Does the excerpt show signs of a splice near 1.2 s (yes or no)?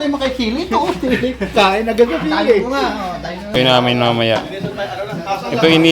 no